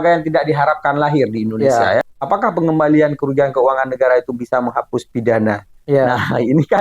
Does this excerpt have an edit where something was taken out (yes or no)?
yes